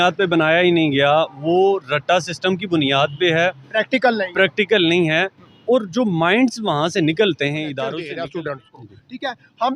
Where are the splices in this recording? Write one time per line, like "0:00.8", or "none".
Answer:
0:08.0